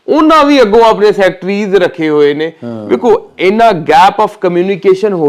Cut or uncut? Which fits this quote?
uncut